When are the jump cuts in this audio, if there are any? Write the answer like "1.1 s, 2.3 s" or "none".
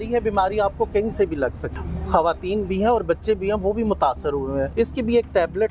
1.7 s, 4.7 s